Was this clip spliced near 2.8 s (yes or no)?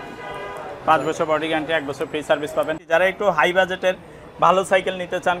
yes